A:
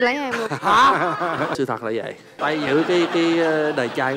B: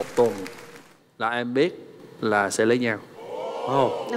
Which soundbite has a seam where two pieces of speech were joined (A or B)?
A